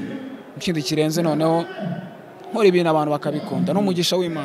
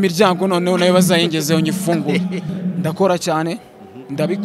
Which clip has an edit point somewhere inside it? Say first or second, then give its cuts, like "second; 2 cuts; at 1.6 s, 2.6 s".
second; 1 cut; at 2.5 s